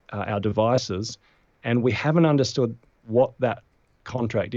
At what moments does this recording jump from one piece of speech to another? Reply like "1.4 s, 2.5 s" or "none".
none